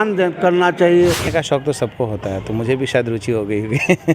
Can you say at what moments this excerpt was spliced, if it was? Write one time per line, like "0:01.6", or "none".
0:01.3